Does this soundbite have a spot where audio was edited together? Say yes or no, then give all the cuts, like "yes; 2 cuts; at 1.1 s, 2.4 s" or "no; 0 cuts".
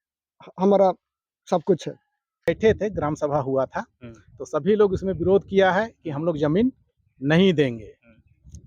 yes; 1 cut; at 2.5 s